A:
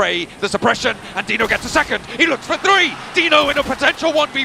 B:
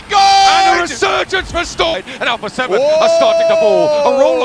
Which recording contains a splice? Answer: B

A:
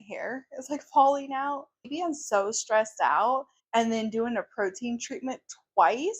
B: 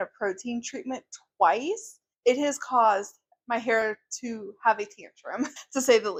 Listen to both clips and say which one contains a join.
A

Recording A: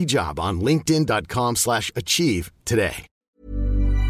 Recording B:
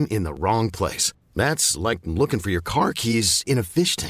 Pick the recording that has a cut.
A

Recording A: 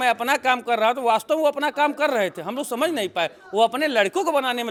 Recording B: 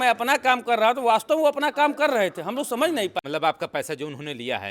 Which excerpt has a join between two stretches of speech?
B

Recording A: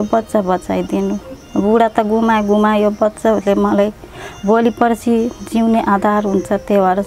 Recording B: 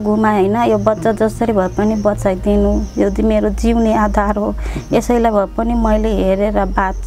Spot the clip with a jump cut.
A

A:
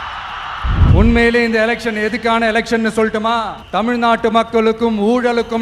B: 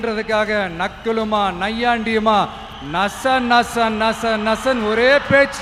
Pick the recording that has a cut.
A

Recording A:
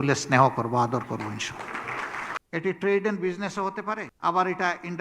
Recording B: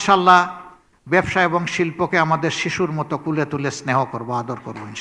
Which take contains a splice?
A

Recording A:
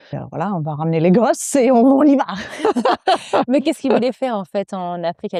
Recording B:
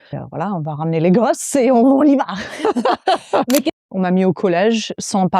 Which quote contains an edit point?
B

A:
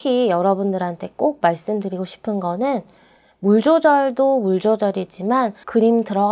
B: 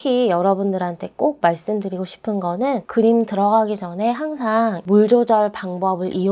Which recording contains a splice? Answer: B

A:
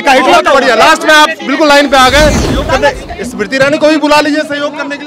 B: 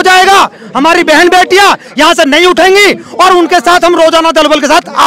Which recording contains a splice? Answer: A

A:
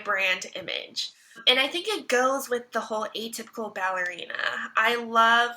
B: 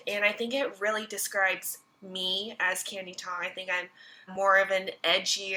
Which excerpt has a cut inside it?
A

